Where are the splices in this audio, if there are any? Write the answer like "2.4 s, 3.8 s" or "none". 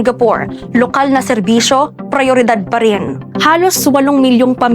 3.2 s

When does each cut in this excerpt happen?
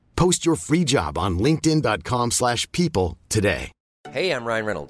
4.0 s

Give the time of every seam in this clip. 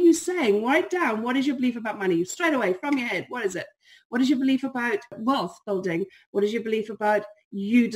5.2 s

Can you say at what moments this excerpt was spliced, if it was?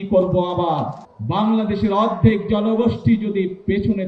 1.0 s

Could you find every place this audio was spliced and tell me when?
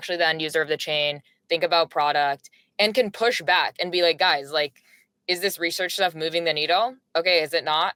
none

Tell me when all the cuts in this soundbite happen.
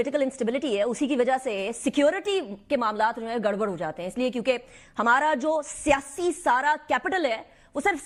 none

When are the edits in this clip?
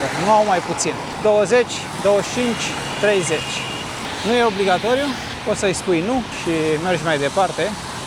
none

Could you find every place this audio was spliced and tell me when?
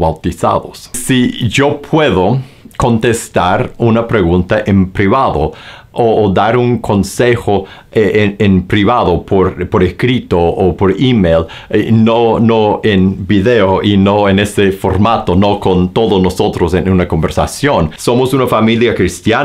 0.9 s, 17.9 s

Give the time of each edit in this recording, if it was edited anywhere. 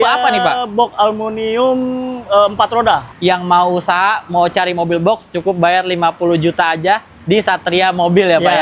3.1 s

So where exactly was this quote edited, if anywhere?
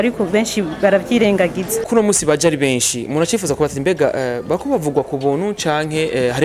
1.9 s

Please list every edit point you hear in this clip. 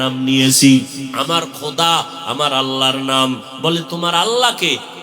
1.1 s

